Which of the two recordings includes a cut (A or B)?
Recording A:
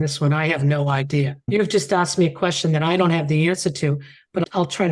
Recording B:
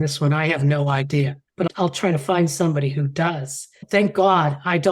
B